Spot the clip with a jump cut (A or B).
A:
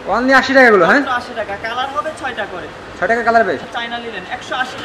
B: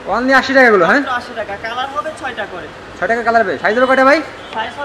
A